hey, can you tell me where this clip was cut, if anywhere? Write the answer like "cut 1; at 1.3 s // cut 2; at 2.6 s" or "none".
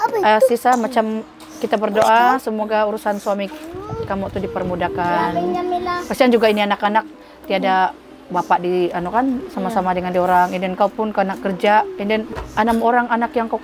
none